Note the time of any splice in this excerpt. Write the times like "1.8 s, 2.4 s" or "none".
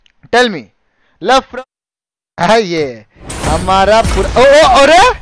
1.5 s